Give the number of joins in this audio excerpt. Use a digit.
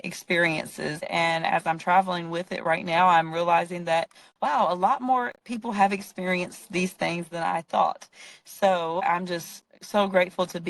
2